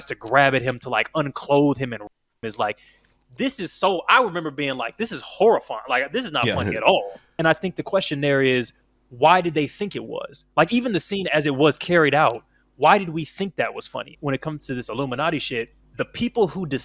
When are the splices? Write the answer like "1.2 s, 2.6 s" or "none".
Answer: 7.2 s, 14.1 s, 15.8 s